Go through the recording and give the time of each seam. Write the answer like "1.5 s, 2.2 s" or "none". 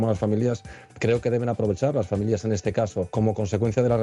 3.1 s